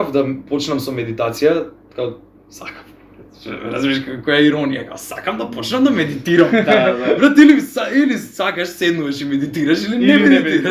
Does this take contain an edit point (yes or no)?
no